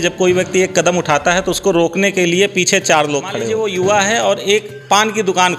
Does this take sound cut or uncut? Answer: cut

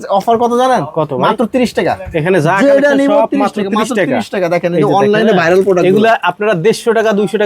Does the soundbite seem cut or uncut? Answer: uncut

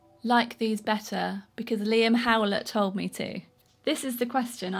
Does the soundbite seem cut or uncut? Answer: uncut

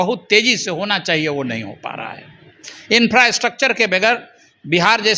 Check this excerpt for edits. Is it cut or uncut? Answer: uncut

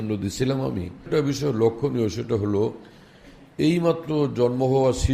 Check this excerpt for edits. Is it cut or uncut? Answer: cut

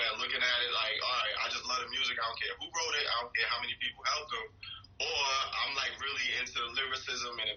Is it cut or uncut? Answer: uncut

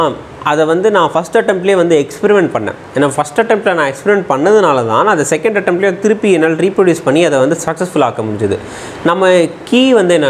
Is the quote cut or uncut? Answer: uncut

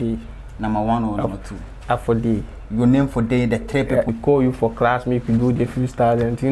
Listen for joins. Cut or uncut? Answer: cut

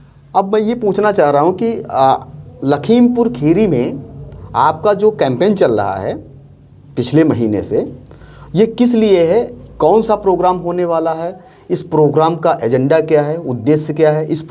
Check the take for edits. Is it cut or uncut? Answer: uncut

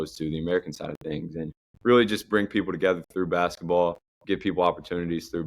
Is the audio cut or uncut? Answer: cut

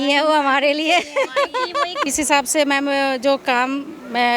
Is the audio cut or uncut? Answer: cut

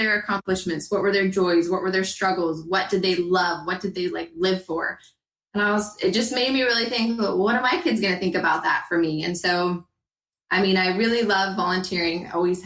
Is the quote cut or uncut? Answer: uncut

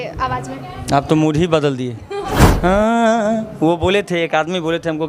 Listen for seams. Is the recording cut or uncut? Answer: cut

